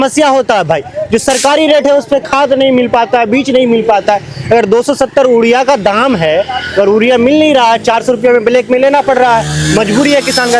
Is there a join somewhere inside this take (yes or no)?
no